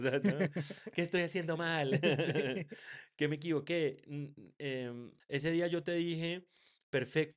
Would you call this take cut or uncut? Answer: cut